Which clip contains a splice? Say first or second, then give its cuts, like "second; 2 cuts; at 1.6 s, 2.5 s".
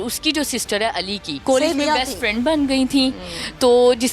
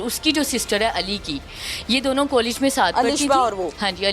first; 1 cut; at 1.3 s